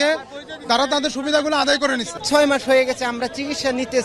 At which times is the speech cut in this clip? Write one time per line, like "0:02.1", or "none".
0:02.2